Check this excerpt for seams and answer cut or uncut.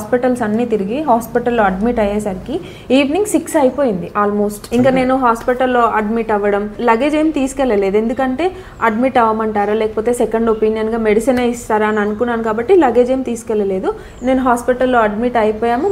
uncut